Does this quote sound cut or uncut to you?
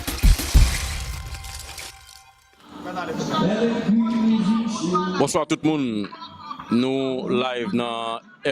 cut